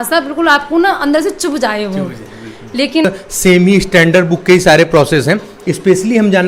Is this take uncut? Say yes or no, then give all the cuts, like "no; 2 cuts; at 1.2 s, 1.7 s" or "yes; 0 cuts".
no; 1 cut; at 3.0 s